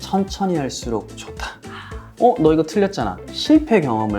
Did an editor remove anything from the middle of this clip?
yes; 2 cuts; at 2.0 s, 3.2 s

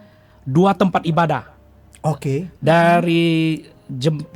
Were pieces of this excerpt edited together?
no; 0 cuts

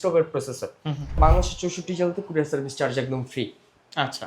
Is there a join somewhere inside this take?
yes; 1 cut; at 1.2 s

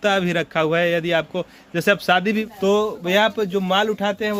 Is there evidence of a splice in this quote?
yes; 1 cut; at 2.4 s

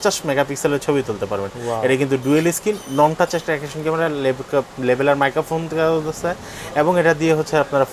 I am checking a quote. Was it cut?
no; 0 cuts

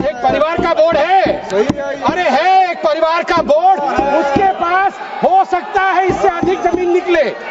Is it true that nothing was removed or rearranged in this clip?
yes; 0 cuts

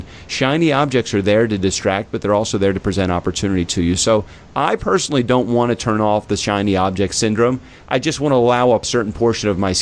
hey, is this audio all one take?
no; 1 cut; at 8.9 s

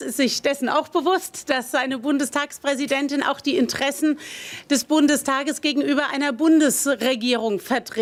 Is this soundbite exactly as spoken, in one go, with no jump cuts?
yes; 0 cuts

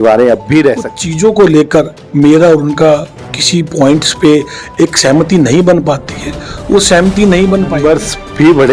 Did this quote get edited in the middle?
yes; 2 cuts; at 1.0 s, 7.7 s

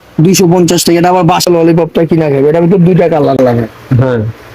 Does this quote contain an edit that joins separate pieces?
yes; 2 cuts; at 1.5 s, 3.4 s

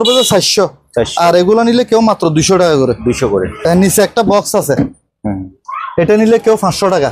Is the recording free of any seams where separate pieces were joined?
yes; 0 cuts

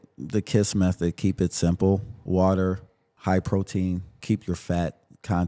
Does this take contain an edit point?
yes; 3 cuts; at 2.1 s, 3.0 s, 4.2 s

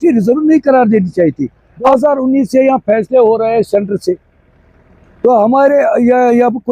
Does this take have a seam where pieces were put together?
yes; 1 cut; at 1.7 s

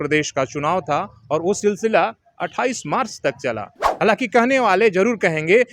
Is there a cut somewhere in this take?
yes; 1 cut; at 3.8 s

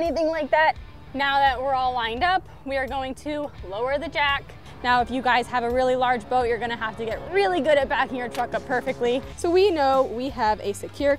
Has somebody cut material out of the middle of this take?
yes; 3 cuts; at 0.9 s, 4.6 s, 9.3 s

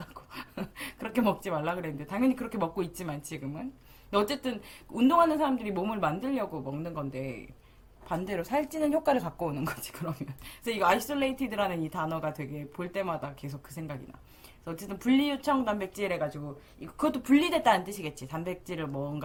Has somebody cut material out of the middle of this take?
no; 0 cuts

